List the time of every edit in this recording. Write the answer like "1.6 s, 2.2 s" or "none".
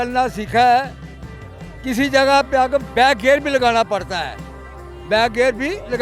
none